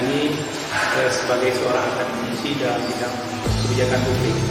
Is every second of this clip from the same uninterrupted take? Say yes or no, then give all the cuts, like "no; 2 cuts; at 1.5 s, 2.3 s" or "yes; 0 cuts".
yes; 0 cuts